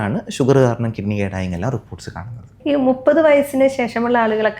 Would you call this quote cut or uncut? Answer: uncut